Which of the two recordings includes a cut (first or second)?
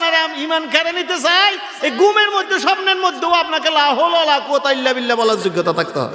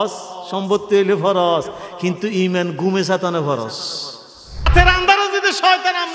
second